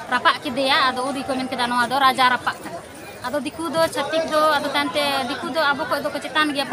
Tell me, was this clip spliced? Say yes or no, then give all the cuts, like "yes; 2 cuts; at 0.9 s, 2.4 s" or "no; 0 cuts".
no; 0 cuts